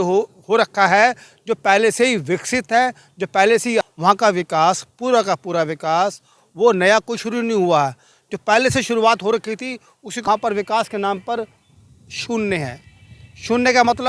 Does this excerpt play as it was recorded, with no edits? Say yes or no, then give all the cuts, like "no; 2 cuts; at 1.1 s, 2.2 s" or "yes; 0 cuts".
no; 2 cuts; at 3.8 s, 10.0 s